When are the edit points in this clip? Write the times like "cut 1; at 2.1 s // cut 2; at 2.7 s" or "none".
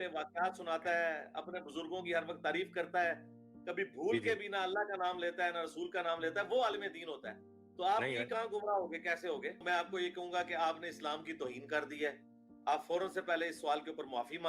cut 1; at 9.6 s